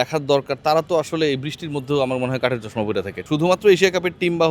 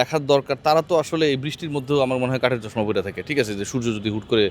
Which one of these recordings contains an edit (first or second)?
first